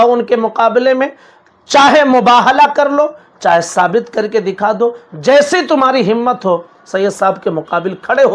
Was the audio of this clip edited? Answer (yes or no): no